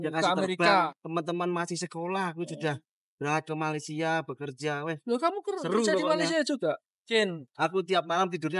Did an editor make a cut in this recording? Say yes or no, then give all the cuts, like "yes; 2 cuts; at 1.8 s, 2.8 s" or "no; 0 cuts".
yes; 2 cuts; at 1.0 s, 7.1 s